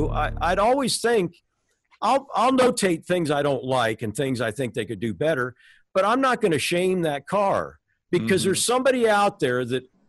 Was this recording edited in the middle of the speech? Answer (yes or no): no